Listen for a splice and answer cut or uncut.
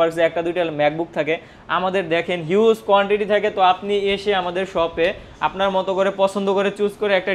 uncut